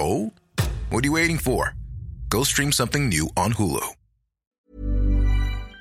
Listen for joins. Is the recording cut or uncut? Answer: cut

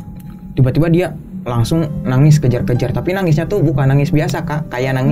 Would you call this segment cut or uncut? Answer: uncut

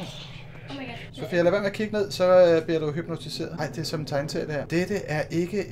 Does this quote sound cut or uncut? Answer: cut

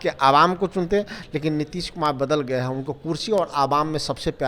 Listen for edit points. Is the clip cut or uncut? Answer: uncut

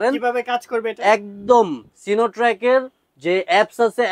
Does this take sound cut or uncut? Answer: uncut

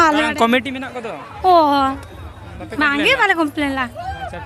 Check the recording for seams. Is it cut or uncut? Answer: uncut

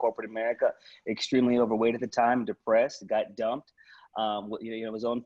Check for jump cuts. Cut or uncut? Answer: uncut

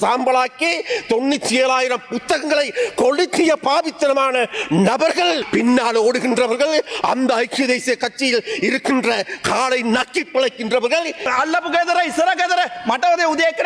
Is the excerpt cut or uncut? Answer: cut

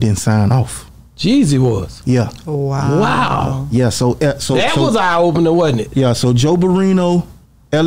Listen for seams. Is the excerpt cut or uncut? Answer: uncut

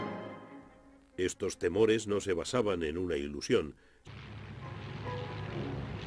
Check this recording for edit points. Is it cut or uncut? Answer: uncut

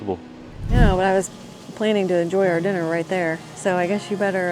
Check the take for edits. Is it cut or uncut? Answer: cut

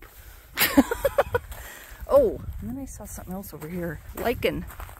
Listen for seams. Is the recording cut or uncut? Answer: cut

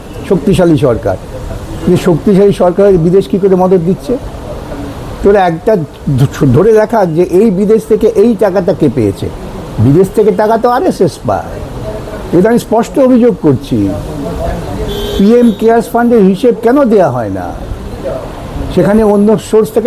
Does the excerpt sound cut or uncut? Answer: uncut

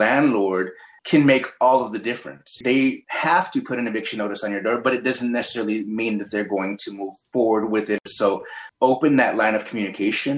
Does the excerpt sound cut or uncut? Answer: cut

